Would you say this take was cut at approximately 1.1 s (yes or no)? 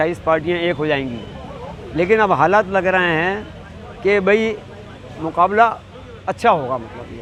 no